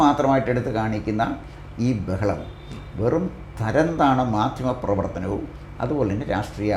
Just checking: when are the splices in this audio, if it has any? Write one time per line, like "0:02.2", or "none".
none